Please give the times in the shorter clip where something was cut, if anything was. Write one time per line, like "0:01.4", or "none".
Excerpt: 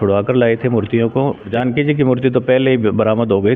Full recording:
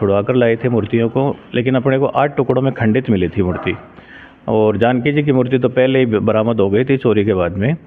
0:01.5